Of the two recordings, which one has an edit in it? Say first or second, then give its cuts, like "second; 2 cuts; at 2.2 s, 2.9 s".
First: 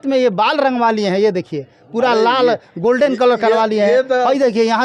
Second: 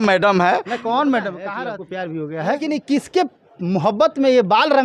second; 2 cuts; at 1.4 s, 2.7 s